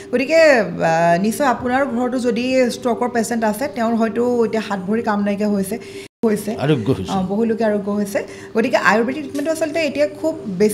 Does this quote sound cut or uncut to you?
cut